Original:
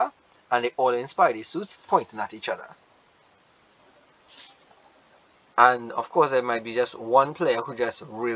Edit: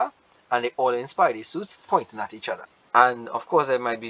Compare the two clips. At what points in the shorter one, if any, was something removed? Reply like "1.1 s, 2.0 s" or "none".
2.7 s